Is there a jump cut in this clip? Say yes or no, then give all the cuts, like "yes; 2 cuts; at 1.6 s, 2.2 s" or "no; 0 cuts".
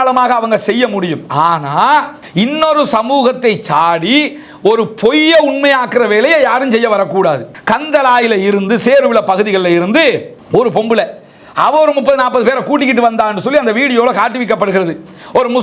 yes; 1 cut; at 7.5 s